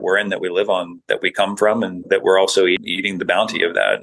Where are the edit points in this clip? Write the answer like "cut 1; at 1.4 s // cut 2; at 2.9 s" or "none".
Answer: cut 1; at 1.0 s // cut 2; at 2.0 s // cut 3; at 2.8 s